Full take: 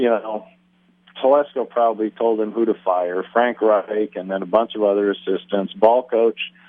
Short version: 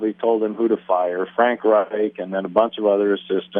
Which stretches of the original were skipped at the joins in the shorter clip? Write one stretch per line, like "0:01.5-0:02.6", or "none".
none